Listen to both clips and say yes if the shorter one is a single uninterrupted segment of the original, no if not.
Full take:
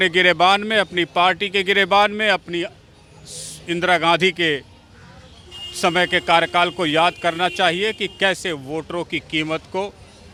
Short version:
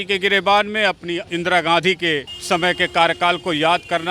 no